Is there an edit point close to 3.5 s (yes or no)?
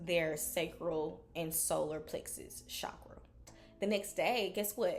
yes